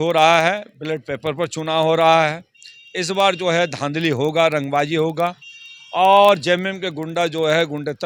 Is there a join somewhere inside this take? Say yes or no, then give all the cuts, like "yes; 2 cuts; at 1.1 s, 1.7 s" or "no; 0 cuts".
no; 0 cuts